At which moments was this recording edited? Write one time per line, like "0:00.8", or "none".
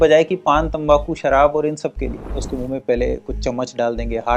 0:02.4